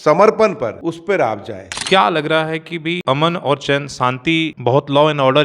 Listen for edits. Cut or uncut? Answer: cut